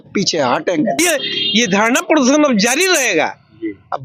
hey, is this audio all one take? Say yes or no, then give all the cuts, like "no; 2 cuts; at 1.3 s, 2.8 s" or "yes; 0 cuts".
no; 1 cut; at 1.0 s